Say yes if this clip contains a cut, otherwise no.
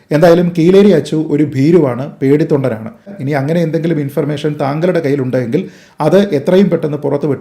yes